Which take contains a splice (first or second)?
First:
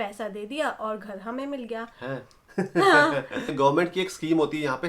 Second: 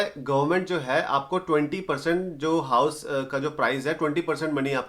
first